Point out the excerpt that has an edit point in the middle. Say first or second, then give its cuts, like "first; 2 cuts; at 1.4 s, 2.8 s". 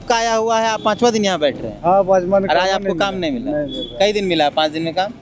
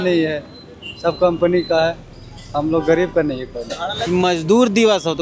second; 1 cut; at 4.1 s